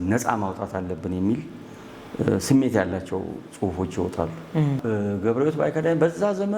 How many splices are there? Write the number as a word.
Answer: one